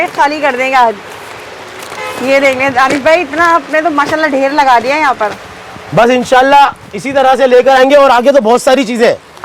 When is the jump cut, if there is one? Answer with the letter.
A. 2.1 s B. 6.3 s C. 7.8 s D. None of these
D